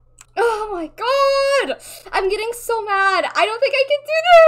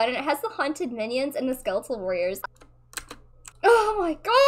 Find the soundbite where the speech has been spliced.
second; 1 cut; at 2.4 s

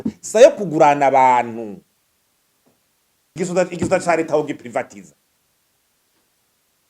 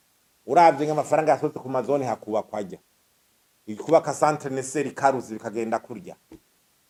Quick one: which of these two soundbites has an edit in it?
first; 1 cut; at 3.4 s

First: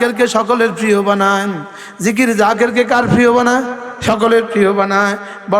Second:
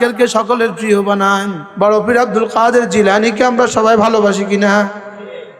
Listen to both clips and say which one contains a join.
second; 1 cut; at 1.6 s

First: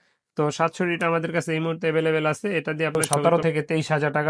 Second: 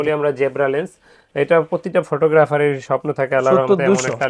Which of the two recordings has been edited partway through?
first; 1 cut; at 2.9 s

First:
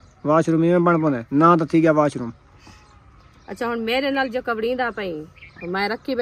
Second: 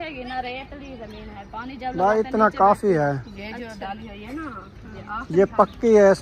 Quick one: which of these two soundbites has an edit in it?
first; 1 cut; at 1.2 s

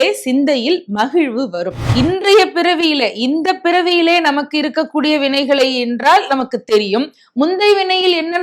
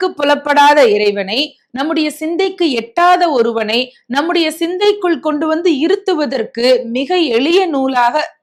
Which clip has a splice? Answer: first; 1 cut; at 1.8 s

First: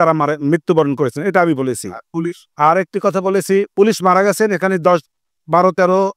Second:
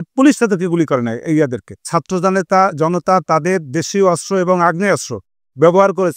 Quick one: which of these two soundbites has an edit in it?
second; 1 cut; at 1.9 s

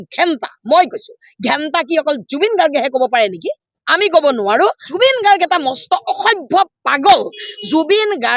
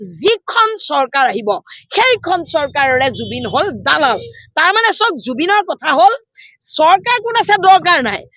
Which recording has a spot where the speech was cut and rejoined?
first; 1 cut; at 4.9 s

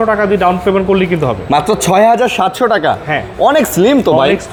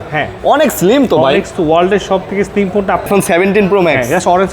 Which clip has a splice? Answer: second; 1 cut; at 3.1 s

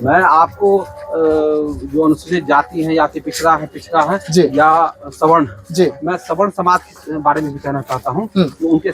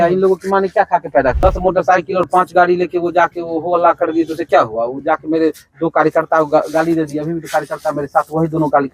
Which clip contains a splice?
second; 1 cut; at 1.4 s

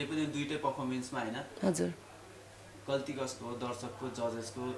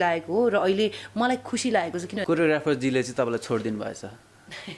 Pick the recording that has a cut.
second; 1 cut; at 2.2 s

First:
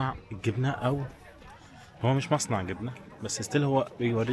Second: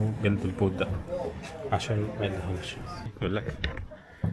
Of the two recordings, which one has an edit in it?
second; 1 cut; at 3.1 s

